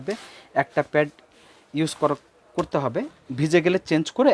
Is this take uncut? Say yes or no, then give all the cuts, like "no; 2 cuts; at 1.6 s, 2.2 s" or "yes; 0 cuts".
yes; 0 cuts